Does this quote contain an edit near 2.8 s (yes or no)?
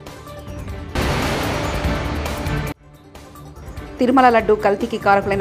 yes